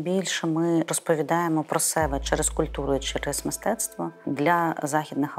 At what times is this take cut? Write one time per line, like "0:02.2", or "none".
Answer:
0:00.9
0:04.2